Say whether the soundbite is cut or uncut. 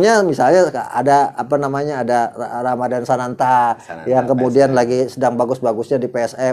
uncut